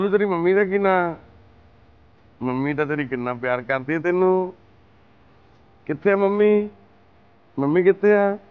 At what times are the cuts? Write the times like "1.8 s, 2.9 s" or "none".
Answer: none